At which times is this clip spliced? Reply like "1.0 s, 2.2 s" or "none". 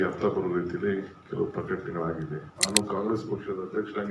2.5 s